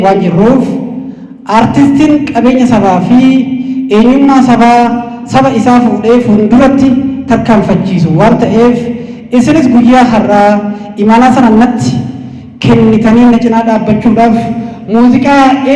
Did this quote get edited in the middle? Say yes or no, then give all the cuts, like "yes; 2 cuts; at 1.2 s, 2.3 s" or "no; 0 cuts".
no; 0 cuts